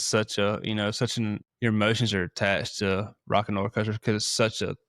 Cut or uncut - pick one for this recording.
cut